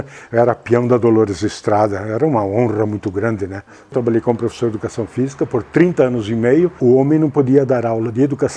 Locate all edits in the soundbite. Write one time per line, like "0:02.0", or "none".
0:03.9
0:06.8